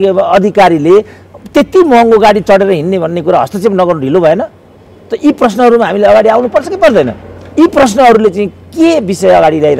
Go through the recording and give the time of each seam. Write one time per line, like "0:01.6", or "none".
none